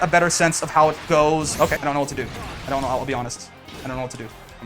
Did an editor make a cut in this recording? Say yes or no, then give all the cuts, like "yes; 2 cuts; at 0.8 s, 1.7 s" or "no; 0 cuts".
yes; 1 cut; at 1.8 s